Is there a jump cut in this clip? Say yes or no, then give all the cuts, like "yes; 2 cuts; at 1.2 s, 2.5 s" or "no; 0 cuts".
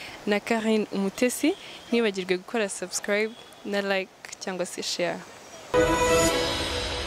yes; 1 cut; at 5.7 s